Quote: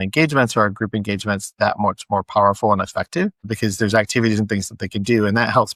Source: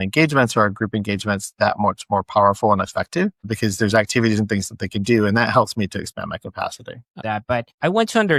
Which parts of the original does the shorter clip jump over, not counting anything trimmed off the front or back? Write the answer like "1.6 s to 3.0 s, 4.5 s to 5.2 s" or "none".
none